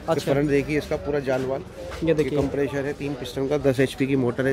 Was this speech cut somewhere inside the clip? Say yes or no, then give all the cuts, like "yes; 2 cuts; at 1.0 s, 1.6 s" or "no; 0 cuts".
no; 0 cuts